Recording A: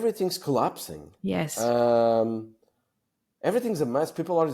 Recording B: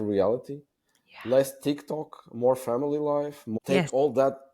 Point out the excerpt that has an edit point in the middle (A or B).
B